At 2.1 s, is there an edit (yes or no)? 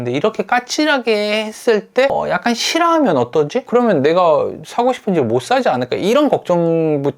yes